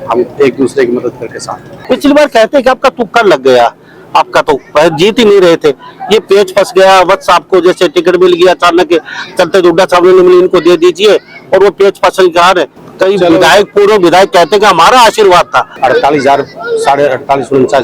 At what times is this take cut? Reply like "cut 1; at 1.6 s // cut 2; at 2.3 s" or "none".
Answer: cut 1; at 1.7 s // cut 2; at 12.8 s // cut 3; at 15.7 s